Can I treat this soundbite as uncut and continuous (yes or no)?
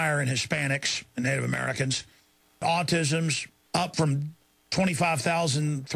no